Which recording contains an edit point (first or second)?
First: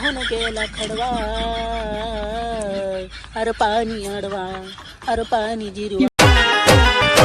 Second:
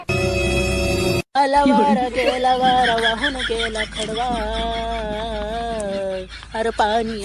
first